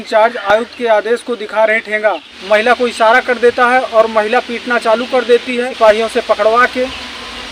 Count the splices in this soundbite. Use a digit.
2